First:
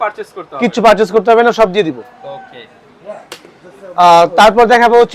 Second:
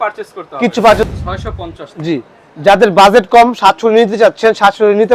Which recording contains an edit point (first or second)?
second